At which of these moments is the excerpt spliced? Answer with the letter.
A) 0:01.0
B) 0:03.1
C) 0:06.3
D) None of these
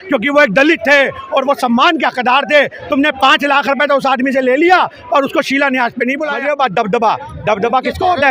C